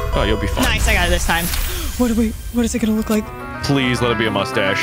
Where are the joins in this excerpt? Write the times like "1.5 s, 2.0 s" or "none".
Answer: 3.5 s